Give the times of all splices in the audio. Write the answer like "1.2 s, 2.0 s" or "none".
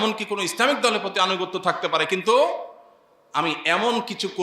none